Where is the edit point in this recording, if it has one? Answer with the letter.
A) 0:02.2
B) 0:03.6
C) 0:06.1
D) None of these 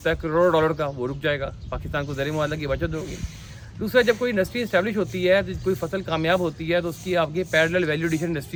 D